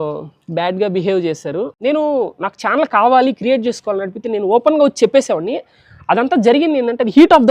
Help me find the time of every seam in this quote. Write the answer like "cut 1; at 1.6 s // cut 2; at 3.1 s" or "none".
cut 1; at 1.7 s

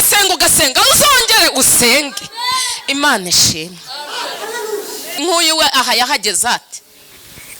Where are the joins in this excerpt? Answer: cut 1; at 5.2 s

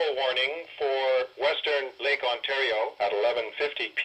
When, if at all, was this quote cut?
none

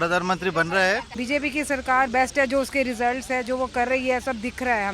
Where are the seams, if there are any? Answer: cut 1; at 1.1 s

